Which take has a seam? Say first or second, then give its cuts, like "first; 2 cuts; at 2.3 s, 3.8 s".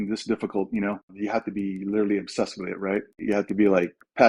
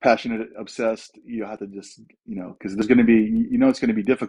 first; 2 cuts; at 1.2 s, 3.2 s